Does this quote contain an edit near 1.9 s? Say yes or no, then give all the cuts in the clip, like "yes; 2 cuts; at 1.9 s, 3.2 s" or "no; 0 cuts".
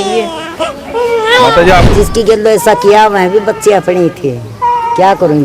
yes; 1 cut; at 1.9 s